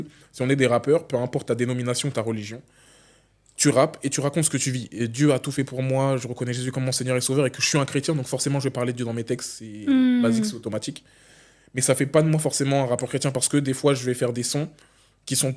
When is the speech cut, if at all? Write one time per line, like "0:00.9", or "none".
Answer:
none